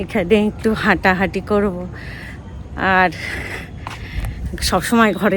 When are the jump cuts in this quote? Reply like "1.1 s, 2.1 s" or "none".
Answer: none